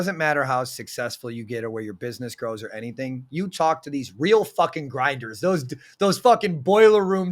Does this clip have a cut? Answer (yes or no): no